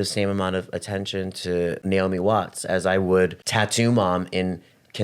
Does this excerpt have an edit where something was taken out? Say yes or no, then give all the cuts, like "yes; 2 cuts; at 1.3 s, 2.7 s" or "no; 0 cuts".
yes; 2 cuts; at 1.8 s, 3.4 s